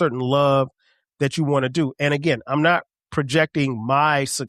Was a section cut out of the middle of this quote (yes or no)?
no